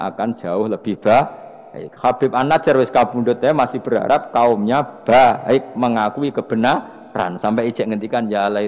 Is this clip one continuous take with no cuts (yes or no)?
yes